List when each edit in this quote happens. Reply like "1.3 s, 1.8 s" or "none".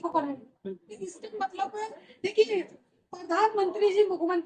none